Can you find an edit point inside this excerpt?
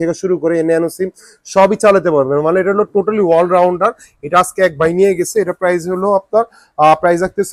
no; 0 cuts

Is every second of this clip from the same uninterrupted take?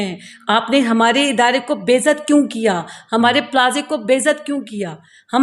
yes; 0 cuts

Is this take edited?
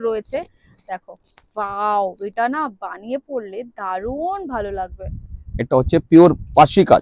no; 0 cuts

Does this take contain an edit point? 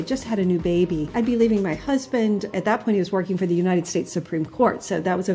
yes; 2 cuts; at 1.1 s, 2.5 s

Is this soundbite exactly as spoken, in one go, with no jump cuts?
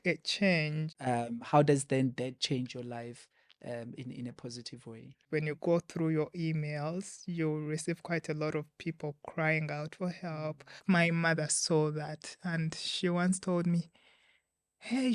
no; 3 cuts; at 0.9 s, 5.2 s, 10.8 s

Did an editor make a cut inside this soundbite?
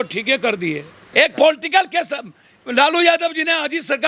yes; 1 cut; at 1.0 s

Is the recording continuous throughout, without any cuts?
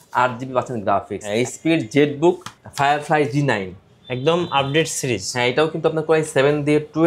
no; 1 cut; at 1.4 s

